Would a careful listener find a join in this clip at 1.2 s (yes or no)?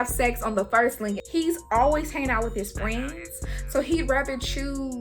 yes